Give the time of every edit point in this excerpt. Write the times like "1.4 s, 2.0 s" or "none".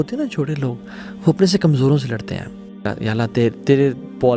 2.9 s